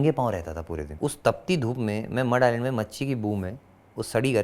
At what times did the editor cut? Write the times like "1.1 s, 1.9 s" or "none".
0.9 s